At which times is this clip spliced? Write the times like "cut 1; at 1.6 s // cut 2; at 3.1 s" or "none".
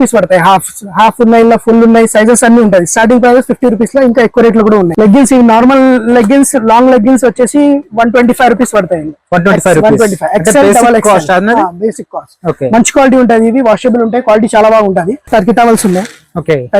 cut 1; at 4.9 s // cut 2; at 15.3 s